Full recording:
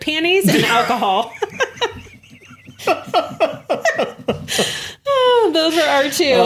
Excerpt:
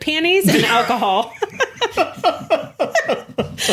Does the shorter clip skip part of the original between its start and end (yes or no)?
yes